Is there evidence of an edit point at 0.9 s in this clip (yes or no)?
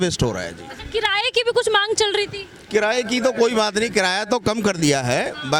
no